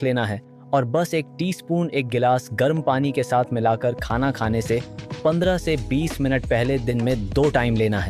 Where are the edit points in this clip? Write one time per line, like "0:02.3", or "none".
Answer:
none